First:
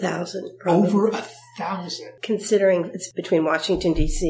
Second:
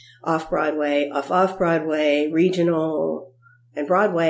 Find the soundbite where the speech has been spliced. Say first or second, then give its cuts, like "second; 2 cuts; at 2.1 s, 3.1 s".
first; 2 cuts; at 2.1 s, 3.0 s